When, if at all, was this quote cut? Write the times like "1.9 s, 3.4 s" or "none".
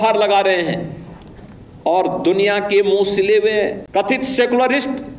3.8 s

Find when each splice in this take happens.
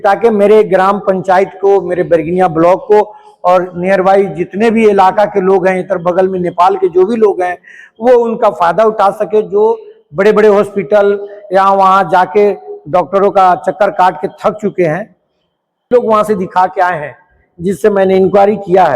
15.9 s

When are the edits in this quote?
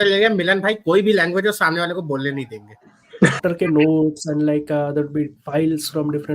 3.4 s

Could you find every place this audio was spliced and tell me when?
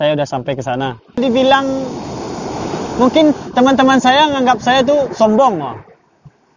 1.1 s

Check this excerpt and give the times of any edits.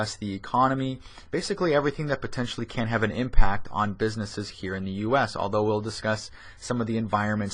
none

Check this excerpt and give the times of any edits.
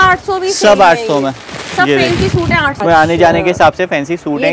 2.7 s

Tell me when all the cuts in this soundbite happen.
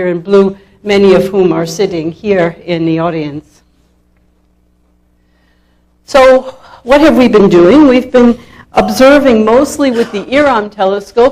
none

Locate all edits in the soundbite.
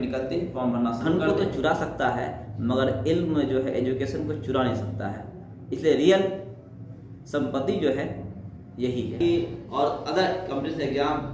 1.0 s, 9.2 s

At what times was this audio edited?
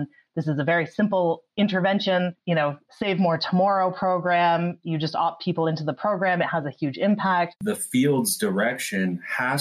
7.5 s

